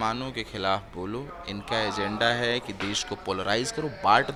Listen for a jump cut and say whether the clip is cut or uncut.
uncut